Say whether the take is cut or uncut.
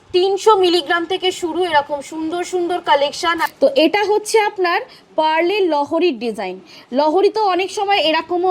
cut